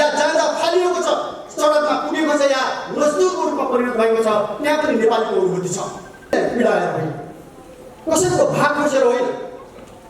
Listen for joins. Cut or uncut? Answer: cut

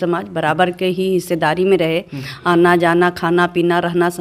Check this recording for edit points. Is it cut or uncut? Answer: uncut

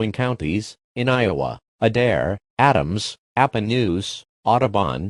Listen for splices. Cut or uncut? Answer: uncut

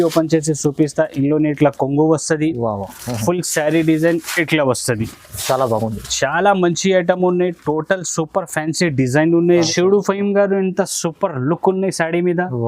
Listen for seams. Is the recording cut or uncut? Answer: cut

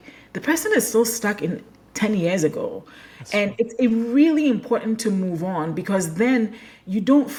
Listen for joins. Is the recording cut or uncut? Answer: uncut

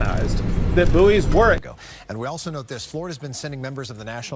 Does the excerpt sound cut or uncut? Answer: cut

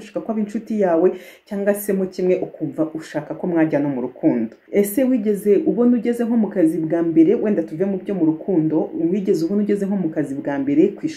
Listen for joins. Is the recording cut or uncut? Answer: cut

